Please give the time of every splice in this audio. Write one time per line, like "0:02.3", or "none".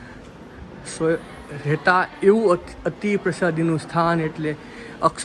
none